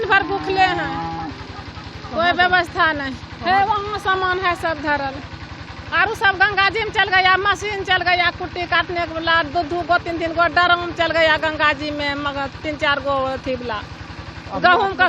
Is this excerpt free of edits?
yes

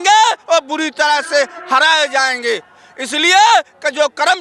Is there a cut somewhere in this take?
no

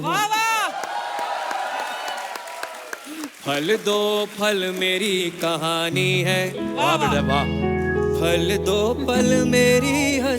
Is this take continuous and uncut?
yes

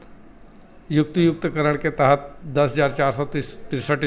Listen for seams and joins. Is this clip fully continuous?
yes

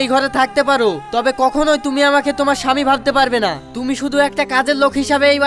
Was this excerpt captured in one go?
yes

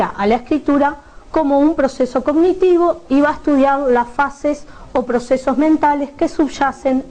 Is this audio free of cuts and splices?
no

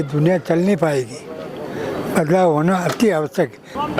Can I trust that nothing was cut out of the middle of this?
yes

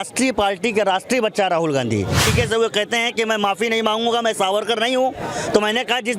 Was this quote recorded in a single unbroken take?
no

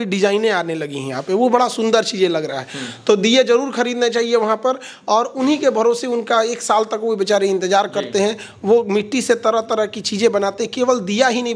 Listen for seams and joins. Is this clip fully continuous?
yes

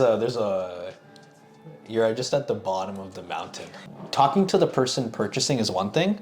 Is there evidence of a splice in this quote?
yes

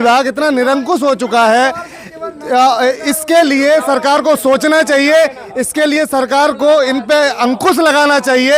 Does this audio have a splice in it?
no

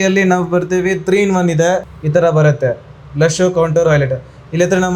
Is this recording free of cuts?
no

